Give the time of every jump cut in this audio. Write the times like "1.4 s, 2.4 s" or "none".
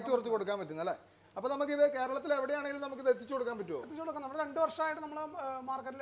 none